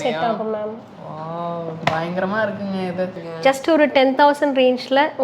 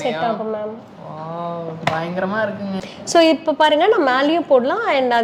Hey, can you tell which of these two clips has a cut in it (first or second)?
first